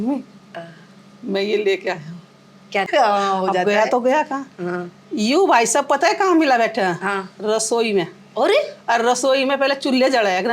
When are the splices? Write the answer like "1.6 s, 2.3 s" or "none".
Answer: 2.9 s